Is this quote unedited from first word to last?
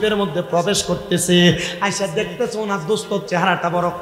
yes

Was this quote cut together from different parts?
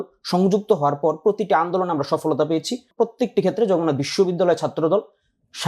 yes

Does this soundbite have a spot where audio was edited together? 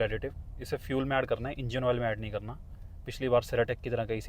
no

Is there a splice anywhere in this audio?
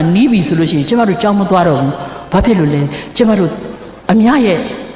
no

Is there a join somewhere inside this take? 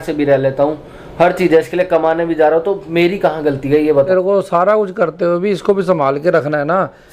yes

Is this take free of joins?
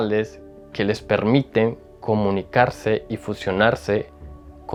yes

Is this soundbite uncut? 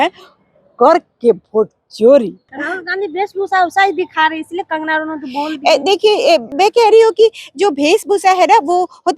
no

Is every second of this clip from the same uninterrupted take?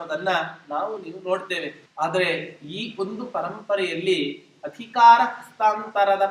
no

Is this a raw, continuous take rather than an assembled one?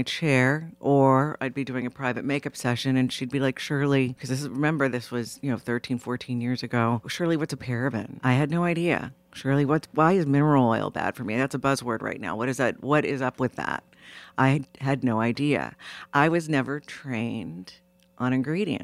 no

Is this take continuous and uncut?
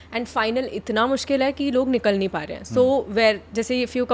yes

